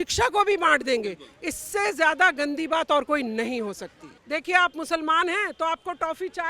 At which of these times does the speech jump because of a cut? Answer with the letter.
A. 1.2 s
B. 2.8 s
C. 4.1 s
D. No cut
C